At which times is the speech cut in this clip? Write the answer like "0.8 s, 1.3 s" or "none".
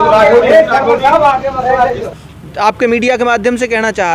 2.1 s